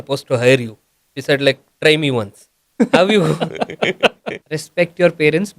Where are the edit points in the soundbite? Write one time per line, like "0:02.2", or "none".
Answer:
0:04.3